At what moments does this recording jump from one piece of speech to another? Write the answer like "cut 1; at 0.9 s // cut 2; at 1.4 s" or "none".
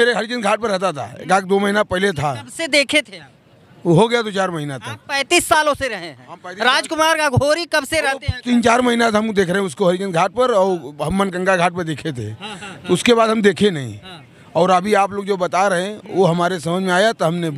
none